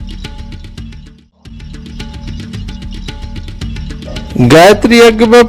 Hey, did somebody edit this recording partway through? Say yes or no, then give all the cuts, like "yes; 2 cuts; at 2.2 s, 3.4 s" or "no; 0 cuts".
yes; 2 cuts; at 1.7 s, 4.0 s